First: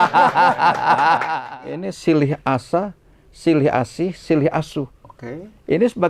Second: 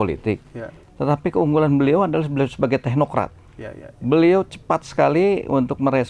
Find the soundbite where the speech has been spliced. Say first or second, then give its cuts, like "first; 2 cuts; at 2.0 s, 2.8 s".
first; 1 cut; at 1.4 s